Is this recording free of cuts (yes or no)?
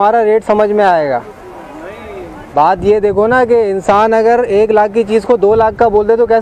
yes